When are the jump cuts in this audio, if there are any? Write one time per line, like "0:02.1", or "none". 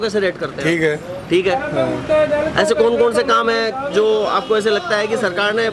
none